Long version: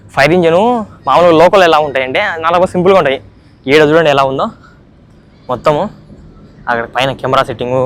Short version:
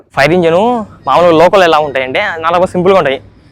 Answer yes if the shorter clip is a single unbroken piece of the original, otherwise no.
yes